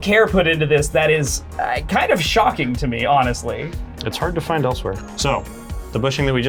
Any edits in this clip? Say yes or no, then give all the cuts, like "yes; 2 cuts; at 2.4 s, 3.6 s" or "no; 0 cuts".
no; 0 cuts